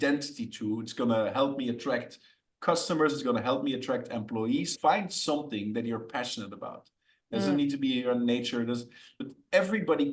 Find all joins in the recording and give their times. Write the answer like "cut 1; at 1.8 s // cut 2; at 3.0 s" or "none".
cut 1; at 9.1 s